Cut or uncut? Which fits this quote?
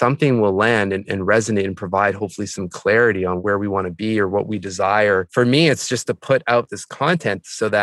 cut